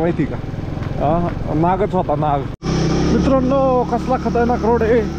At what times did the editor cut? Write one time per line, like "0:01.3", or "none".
0:02.6